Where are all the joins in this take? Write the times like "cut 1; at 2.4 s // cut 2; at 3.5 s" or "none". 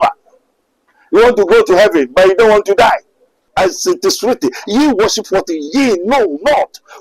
cut 1; at 3.5 s